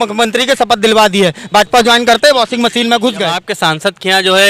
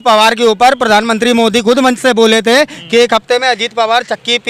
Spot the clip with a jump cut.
first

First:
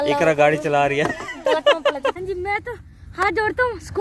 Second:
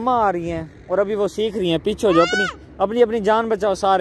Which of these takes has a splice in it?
first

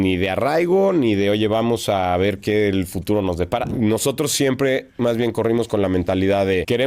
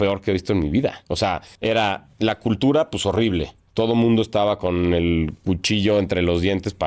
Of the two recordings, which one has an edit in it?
first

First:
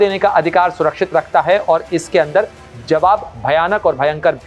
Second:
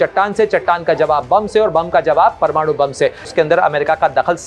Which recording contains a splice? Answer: second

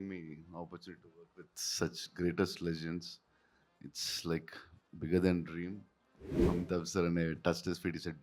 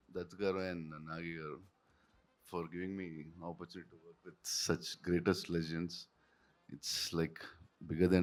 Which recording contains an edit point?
first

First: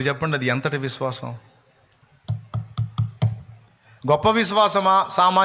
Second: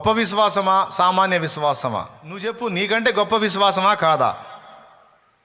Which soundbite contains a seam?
second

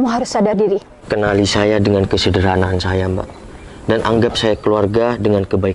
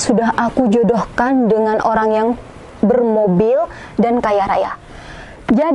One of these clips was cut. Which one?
first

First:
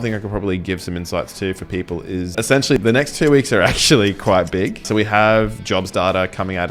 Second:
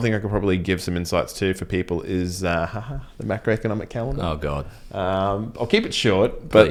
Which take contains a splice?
first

